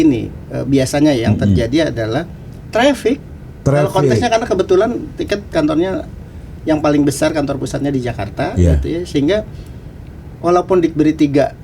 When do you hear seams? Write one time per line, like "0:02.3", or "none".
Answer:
none